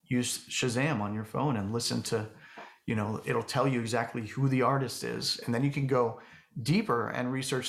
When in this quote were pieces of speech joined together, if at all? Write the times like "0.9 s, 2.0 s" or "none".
none